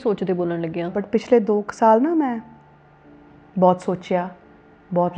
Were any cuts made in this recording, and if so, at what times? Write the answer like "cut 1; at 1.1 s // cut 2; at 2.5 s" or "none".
cut 1; at 1.0 s